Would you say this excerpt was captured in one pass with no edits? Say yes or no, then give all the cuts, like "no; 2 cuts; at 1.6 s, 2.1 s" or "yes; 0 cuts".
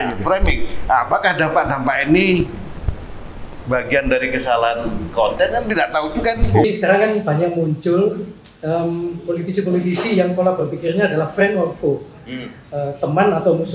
no; 1 cut; at 6.6 s